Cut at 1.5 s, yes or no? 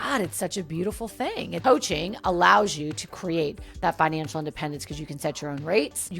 yes